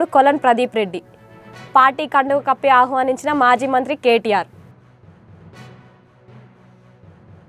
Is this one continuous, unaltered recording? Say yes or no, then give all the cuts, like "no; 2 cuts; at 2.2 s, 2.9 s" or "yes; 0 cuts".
yes; 0 cuts